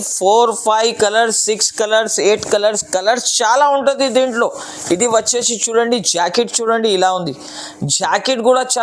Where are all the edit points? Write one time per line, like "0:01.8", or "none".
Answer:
none